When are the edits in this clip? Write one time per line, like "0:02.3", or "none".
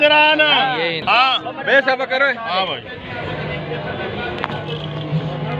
0:01.0